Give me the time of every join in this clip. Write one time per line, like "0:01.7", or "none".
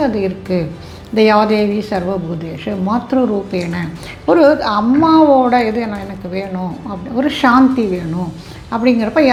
none